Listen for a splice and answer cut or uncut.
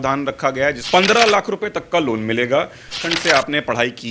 cut